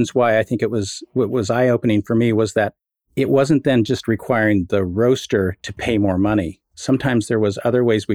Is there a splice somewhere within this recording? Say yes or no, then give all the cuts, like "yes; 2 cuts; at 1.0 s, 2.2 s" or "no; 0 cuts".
no; 0 cuts